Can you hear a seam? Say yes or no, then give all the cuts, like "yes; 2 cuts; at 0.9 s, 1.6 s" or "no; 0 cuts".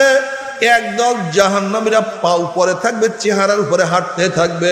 no; 0 cuts